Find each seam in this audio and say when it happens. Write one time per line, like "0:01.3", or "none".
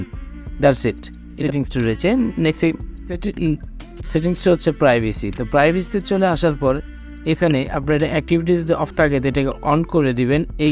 0:01.4
0:03.2